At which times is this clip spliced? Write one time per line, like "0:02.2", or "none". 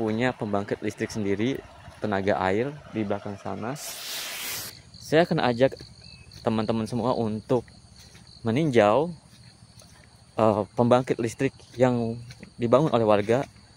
0:04.5

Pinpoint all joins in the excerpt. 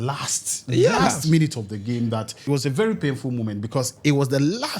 0:02.4

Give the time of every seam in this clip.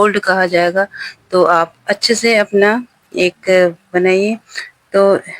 none

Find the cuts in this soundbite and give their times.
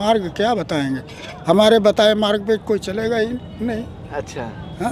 none

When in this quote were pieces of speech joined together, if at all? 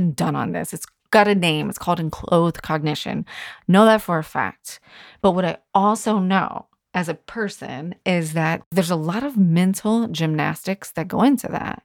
0:05.0
0:08.6

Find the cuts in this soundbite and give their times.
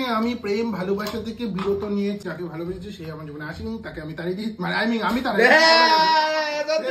0:02.2

